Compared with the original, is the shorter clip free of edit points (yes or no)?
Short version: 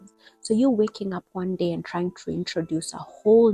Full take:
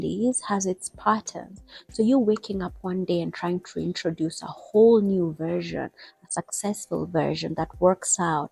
yes